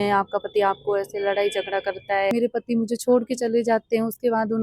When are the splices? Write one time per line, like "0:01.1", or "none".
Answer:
0:02.3